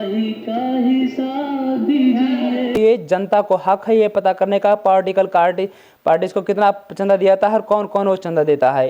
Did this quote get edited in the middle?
yes; 1 cut; at 2.8 s

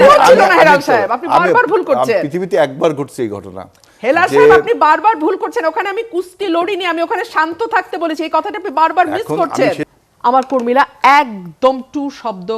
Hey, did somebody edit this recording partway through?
yes; 1 cut; at 9.8 s

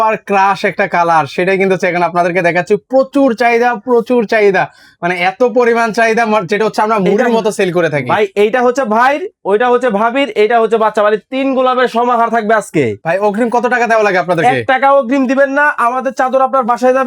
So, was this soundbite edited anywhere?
yes; 1 cut; at 13.0 s

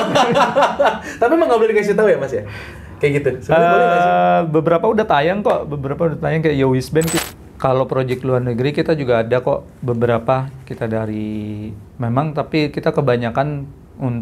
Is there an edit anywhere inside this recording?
yes; 1 cut; at 7.2 s

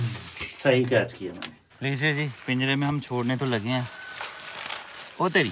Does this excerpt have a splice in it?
no; 0 cuts

